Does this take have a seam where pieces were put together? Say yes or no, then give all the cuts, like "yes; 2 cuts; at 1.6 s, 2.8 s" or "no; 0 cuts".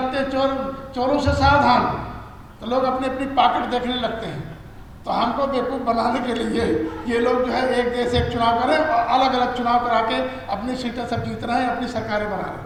no; 0 cuts